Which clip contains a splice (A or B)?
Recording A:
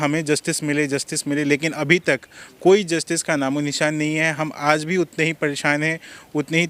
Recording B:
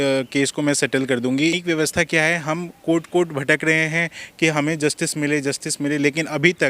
B